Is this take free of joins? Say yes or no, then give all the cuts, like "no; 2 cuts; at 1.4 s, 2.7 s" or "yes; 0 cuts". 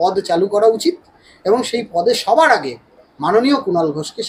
yes; 0 cuts